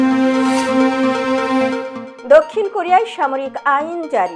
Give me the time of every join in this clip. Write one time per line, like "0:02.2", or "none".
none